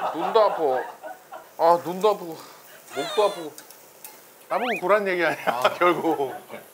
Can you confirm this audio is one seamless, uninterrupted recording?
yes; 0 cuts

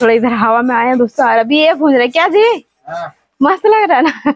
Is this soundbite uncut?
yes; 0 cuts

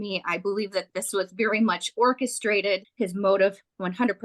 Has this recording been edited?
yes; 1 cut; at 2.9 s

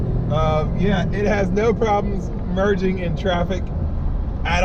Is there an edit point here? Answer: no; 0 cuts

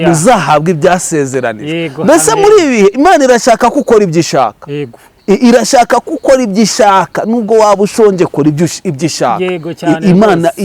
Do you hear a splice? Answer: no; 0 cuts

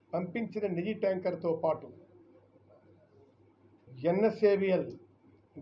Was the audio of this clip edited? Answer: yes; 1 cut; at 3.9 s

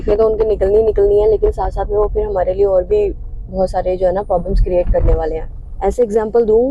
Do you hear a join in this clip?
no; 0 cuts

